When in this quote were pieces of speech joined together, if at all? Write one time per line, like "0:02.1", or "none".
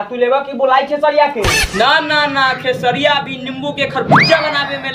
none